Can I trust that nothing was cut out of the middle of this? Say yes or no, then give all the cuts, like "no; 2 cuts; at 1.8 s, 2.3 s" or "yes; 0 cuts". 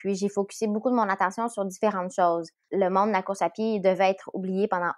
no; 1 cut; at 2.6 s